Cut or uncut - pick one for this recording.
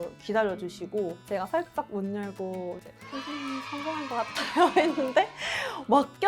cut